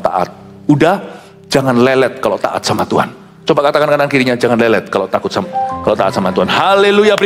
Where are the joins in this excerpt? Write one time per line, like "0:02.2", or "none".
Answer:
none

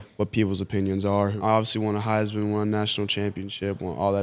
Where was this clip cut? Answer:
0:01.3

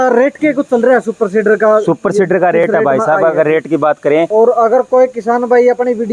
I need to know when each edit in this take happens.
0:04.3

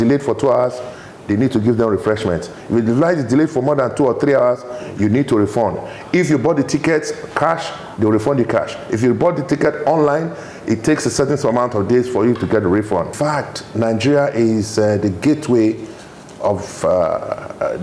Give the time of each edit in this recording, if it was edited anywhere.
0:13.1

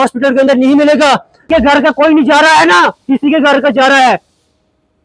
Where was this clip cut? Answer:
0:01.5

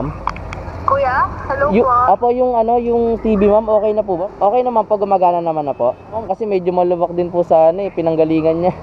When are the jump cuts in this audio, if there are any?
0:04.3
0:06.2

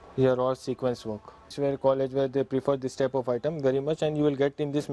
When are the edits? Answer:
0:01.5

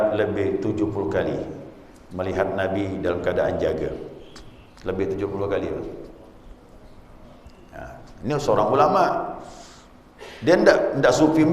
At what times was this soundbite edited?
none

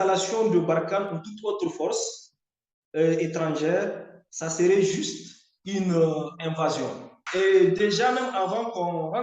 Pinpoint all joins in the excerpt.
0:07.1

